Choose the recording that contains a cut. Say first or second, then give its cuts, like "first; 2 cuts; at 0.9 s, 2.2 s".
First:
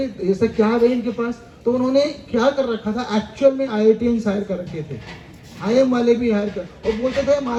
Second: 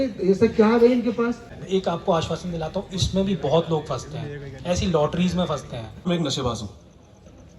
second; 2 cuts; at 1.5 s, 6.0 s